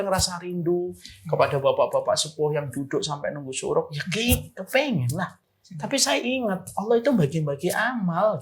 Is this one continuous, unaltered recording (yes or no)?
yes